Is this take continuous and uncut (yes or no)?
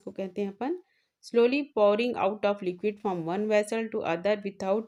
yes